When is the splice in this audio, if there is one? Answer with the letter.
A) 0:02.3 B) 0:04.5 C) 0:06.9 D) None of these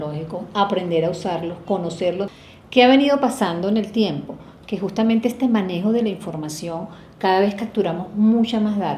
A